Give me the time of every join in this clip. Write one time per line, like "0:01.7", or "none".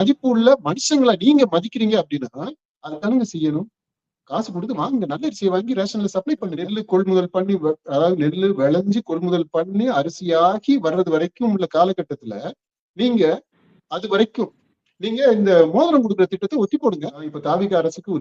0:06.8
0:17.4